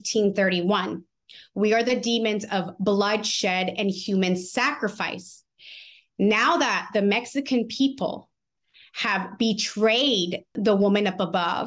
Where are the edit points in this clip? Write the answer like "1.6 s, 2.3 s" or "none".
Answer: 10.5 s